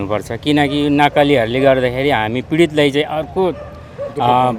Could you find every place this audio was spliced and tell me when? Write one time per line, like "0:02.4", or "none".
none